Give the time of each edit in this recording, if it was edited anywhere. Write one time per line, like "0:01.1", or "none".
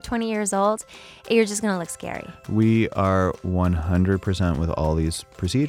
none